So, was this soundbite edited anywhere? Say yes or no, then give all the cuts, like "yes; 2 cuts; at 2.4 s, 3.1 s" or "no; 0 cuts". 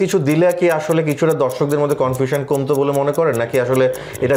no; 0 cuts